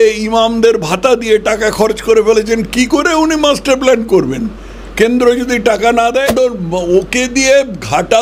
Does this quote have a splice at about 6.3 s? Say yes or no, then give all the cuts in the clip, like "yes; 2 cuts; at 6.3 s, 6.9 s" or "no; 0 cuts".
yes; 1 cut; at 6.3 s